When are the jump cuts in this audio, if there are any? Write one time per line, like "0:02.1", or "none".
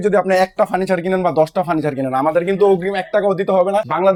none